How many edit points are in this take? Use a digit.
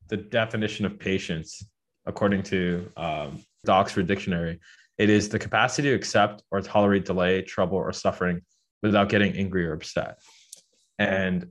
1